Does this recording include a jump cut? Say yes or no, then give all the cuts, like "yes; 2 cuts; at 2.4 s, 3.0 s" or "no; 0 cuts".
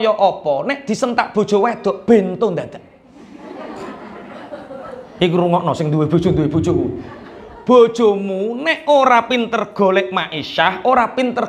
no; 0 cuts